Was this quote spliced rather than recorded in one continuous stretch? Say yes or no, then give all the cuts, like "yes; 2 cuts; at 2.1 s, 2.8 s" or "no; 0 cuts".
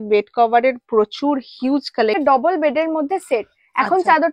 yes; 1 cut; at 2.2 s